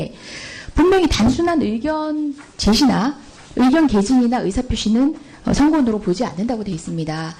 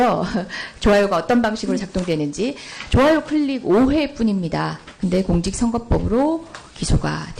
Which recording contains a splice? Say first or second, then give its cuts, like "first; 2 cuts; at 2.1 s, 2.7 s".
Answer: first; 1 cut; at 5.7 s